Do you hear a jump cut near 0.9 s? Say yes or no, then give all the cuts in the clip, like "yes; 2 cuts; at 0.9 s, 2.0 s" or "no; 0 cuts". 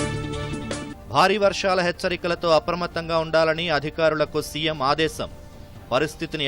yes; 1 cut; at 0.9 s